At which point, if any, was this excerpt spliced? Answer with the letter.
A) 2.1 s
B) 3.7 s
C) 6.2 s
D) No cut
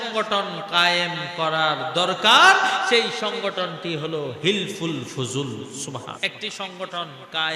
C